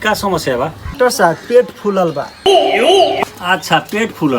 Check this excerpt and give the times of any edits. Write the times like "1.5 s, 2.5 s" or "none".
0.9 s